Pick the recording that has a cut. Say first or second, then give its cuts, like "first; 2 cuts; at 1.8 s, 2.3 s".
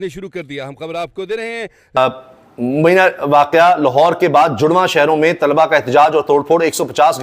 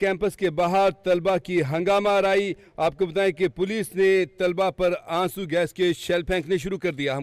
first; 1 cut; at 1.9 s